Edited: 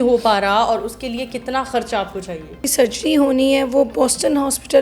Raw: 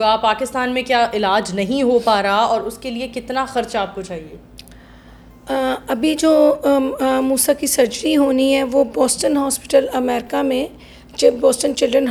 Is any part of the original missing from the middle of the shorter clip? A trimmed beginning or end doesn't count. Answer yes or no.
yes